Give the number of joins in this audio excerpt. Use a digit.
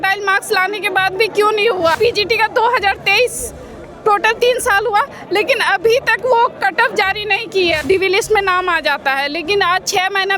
2